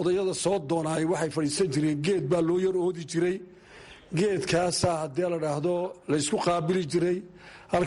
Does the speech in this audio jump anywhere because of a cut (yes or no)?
no